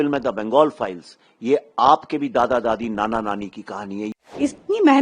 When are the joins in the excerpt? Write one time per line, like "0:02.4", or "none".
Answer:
0:04.1